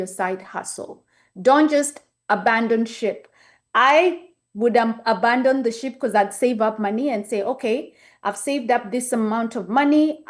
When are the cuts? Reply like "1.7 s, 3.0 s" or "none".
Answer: none